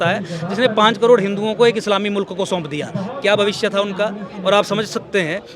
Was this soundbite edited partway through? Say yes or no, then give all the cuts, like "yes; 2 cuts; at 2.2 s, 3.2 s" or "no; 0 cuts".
no; 0 cuts